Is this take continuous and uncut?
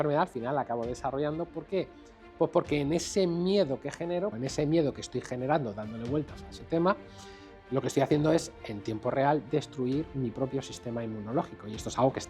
no; 1 cut; at 4.3 s

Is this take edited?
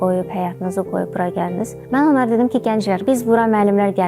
yes; 2 cuts; at 1.8 s, 3.0 s

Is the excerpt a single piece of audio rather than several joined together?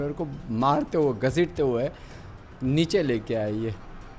yes; 0 cuts

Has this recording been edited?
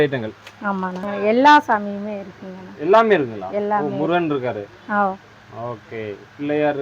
yes; 1 cut; at 1.0 s

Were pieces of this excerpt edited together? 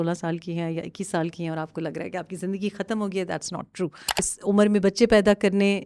yes; 1 cut; at 4.3 s

